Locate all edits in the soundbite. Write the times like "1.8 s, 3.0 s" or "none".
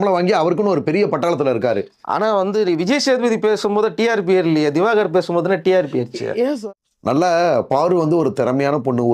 6.6 s